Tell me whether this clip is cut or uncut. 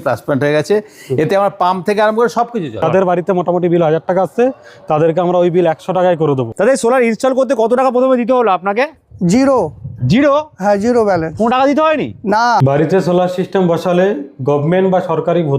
cut